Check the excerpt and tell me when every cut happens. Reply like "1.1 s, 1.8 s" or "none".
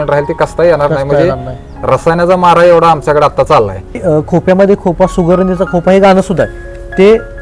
4.0 s